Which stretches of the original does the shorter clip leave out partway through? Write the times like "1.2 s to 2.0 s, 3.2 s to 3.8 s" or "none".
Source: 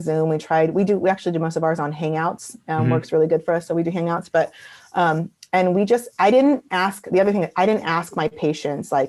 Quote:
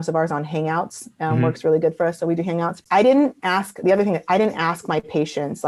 4.3 s to 6.1 s